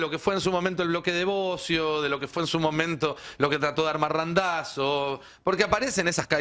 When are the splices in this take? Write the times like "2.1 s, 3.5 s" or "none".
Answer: none